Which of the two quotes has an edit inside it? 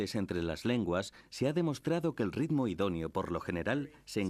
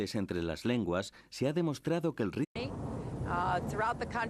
first; 1 cut; at 2.5 s

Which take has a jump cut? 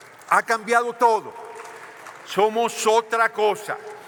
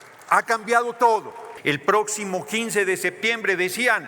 second; 1 cut; at 1.5 s

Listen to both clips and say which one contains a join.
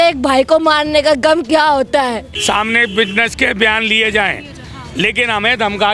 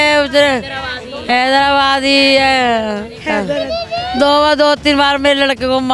first; 1 cut; at 2.3 s

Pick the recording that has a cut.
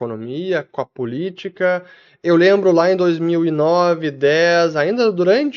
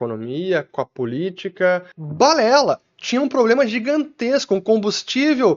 second; 1 cut; at 2.0 s

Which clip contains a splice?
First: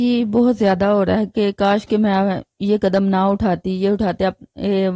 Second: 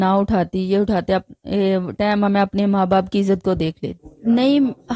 second; 1 cut; at 4.0 s

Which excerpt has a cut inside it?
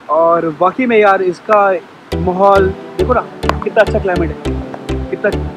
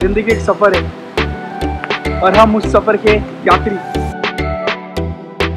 second; 3 cuts; at 0.9 s, 2.2 s, 3.8 s

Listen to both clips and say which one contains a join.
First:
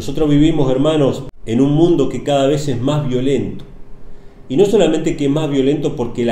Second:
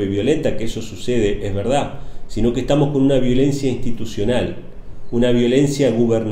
first; 1 cut; at 1.3 s

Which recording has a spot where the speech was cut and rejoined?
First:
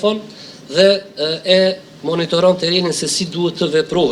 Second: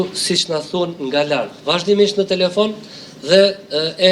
second; 1 cut; at 1.6 s

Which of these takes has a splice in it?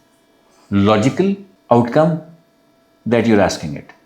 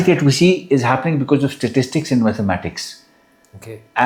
first; 1 cut; at 1.5 s

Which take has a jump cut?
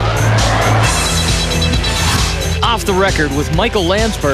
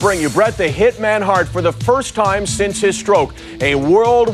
first; 1 cut; at 2.5 s

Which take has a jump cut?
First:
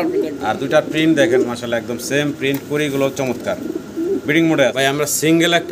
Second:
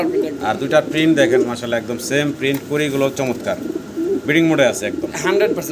first; 1 cut; at 4.7 s

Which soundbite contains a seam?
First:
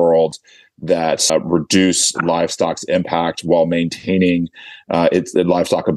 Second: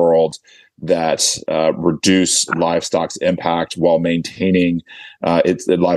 first; 1 cut; at 1.3 s

